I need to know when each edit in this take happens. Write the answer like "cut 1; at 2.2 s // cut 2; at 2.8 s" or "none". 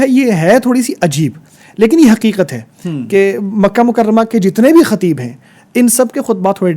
none